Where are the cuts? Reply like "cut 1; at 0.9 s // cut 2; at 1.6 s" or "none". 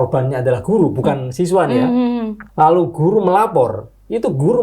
cut 1; at 2.4 s